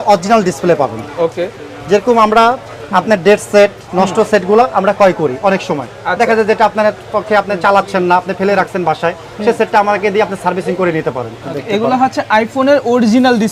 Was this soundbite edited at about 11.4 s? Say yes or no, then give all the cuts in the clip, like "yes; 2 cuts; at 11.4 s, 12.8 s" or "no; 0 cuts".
yes; 1 cut; at 11.4 s